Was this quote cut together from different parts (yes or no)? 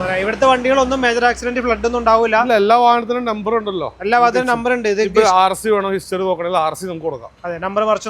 no